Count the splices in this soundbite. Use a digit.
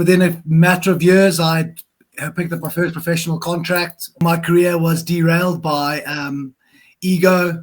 1